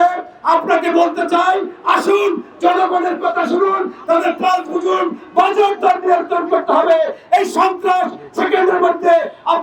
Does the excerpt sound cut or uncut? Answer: uncut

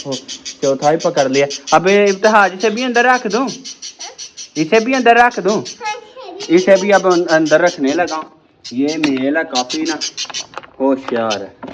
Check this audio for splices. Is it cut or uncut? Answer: uncut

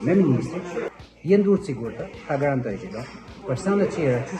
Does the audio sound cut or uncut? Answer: cut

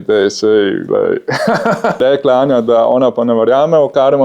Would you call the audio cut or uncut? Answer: cut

